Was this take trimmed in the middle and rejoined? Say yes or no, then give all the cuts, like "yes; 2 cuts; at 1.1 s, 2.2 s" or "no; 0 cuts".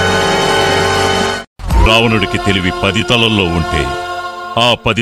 no; 0 cuts